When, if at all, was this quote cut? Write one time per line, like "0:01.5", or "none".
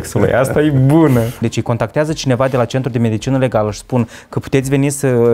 0:01.5